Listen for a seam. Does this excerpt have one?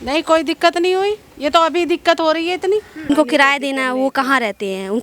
yes; 1 cut; at 3.1 s

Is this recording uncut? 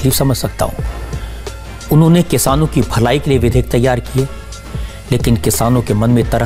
yes; 0 cuts

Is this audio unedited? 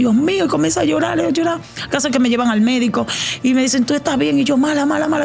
yes; 0 cuts

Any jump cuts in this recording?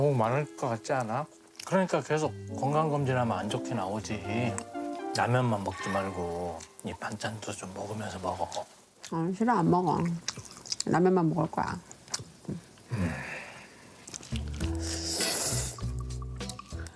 no; 0 cuts

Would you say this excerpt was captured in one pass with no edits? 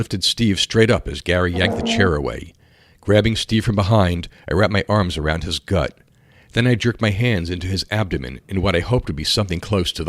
yes; 0 cuts

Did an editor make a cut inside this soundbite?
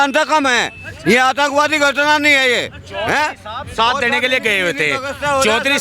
no; 0 cuts

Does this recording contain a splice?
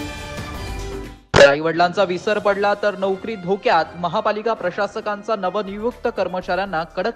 yes; 1 cut; at 1.0 s

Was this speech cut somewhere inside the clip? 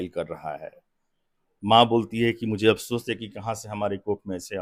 no; 0 cuts

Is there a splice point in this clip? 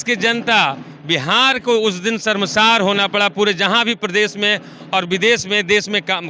no; 0 cuts

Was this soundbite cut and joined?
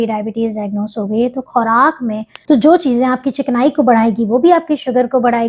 yes; 1 cut; at 2.3 s

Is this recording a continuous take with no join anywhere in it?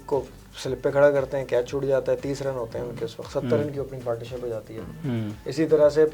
yes; 0 cuts

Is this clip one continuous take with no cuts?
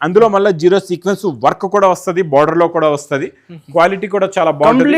yes; 0 cuts

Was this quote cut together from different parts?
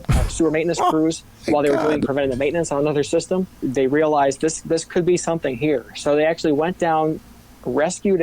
yes; 1 cut; at 3.6 s

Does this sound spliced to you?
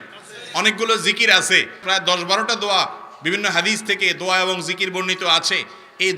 yes; 1 cut; at 1.8 s

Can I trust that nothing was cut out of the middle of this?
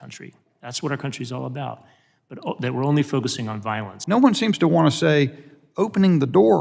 no; 1 cut; at 3.9 s

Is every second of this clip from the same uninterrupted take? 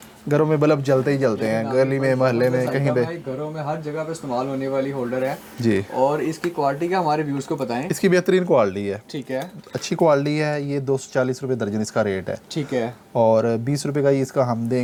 yes; 0 cuts

